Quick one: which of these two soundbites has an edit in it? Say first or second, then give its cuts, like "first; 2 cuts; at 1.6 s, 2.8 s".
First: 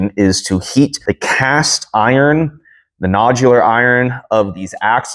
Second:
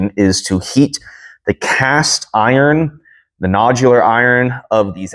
first; 1 cut; at 1.0 s